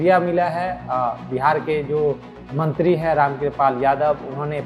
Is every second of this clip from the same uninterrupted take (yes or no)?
yes